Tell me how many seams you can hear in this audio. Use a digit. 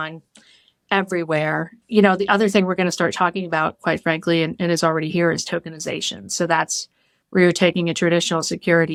0